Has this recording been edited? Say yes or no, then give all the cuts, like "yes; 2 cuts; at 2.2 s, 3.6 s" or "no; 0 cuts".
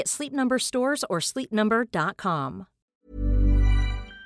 yes; 1 cut; at 2.8 s